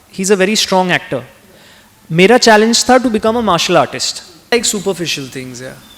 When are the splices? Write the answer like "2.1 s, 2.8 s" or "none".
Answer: 4.5 s